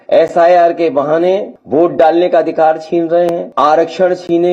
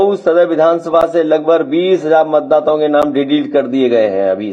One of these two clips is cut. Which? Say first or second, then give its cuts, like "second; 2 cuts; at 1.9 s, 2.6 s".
first; 2 cuts; at 1.5 s, 3.4 s